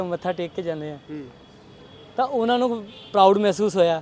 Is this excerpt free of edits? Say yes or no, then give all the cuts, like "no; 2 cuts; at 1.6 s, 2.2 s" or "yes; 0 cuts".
yes; 0 cuts